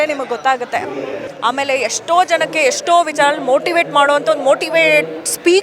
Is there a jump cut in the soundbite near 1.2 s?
yes; 1 cut; at 1.2 s

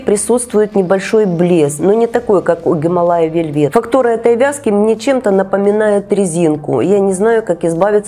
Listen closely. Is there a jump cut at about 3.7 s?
yes; 2 cuts; at 1.8 s, 3.7 s

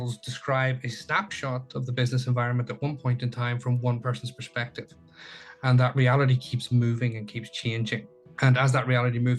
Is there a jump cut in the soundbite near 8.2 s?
yes; 1 cut; at 8.2 s

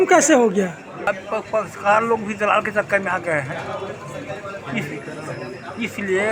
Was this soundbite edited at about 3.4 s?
no; 0 cuts

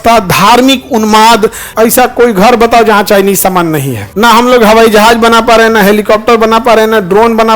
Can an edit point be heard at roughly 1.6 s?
yes; 2 cuts; at 1.6 s, 3.9 s

